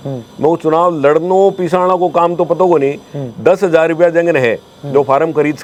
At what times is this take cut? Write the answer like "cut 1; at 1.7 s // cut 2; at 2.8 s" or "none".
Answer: none